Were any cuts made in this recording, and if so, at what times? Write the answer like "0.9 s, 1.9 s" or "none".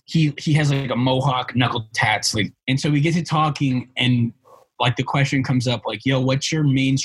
2.5 s